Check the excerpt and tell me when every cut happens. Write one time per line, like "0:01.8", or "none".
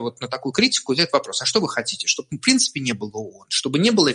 none